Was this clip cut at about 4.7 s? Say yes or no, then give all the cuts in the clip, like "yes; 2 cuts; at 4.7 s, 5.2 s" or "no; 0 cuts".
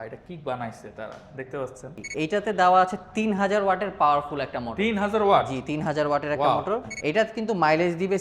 no; 2 cuts; at 2.0 s, 6.9 s